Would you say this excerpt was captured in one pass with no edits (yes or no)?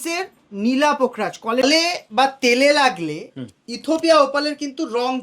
no